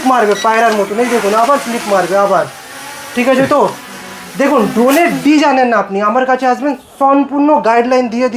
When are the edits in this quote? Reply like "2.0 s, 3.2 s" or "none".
none